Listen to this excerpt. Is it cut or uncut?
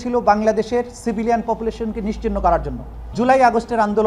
cut